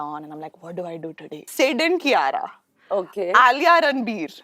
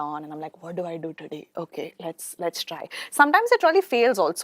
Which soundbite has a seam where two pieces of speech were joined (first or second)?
first